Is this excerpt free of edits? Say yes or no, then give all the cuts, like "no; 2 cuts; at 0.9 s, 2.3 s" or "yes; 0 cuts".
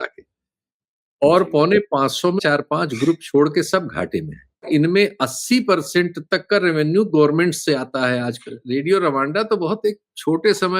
no; 3 cuts; at 2.4 s, 4.7 s, 8.5 s